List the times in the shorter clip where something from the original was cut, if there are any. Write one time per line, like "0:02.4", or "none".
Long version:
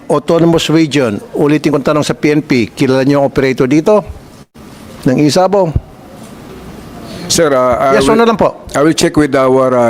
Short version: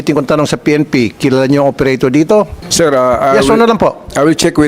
0:02.6